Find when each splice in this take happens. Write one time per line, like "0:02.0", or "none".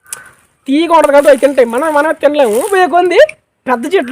0:02.7

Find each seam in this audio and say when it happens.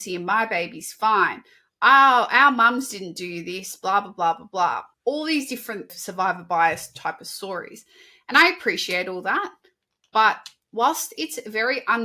0:04.9
0:06.0

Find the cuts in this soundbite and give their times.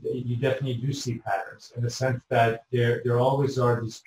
none

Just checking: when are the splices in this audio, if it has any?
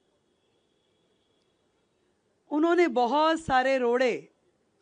none

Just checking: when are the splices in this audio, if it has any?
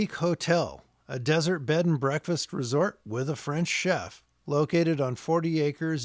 none

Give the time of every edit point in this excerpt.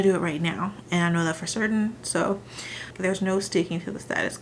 0:02.9

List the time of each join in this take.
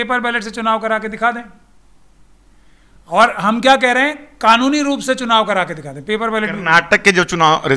none

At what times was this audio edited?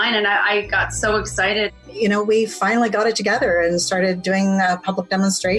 0:01.7

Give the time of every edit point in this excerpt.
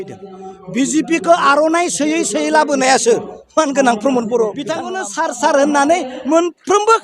0:04.9

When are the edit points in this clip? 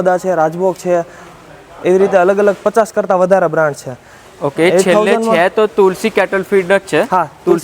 none

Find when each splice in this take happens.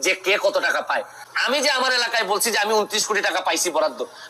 0:01.2

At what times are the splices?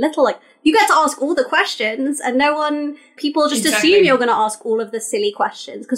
0:03.2

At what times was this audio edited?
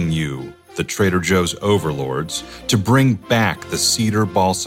none

